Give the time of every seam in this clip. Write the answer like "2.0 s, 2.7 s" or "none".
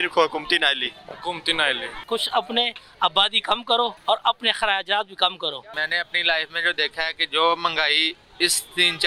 1.9 s, 4.0 s, 5.7 s